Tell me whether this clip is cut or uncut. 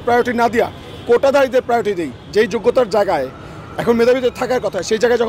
cut